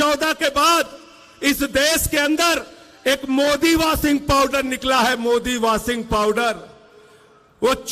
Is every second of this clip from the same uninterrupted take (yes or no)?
yes